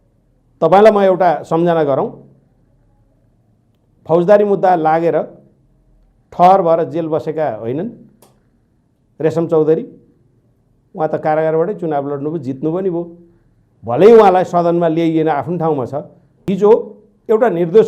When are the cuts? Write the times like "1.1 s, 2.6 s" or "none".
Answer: 16.4 s

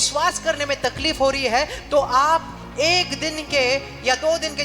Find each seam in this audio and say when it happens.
none

